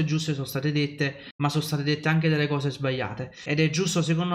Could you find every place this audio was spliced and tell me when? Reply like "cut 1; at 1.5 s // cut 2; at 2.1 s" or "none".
cut 1; at 1.2 s // cut 2; at 3.4 s